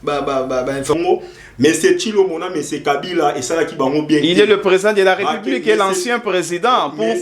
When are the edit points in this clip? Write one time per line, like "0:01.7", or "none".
0:00.9

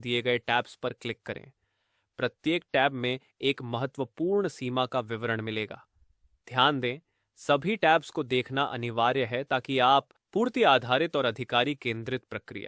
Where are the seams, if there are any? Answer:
0:10.2

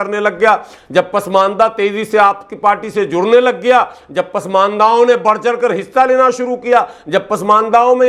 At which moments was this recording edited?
none

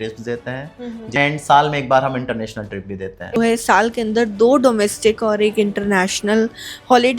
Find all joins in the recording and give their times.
0:01.2
0:03.4

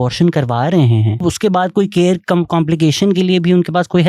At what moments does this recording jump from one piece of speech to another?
0:01.1

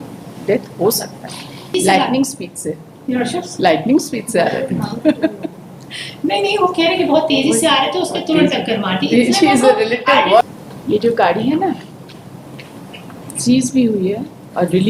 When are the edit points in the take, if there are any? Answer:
0:01.7
0:10.4

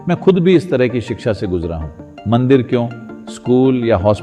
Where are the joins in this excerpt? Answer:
none

